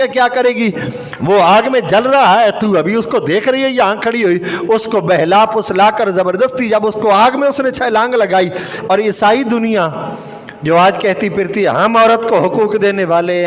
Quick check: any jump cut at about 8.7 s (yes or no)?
yes